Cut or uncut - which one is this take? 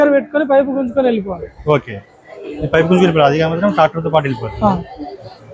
uncut